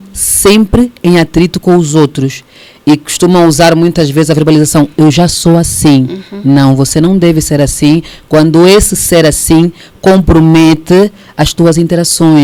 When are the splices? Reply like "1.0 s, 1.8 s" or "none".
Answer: none